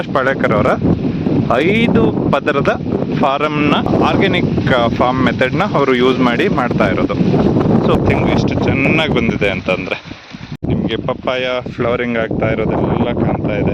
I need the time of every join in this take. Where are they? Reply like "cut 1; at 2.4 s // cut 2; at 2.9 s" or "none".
cut 1; at 3.9 s // cut 2; at 8.0 s // cut 3; at 10.6 s